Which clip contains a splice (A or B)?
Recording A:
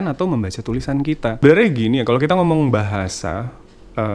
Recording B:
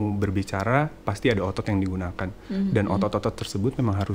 A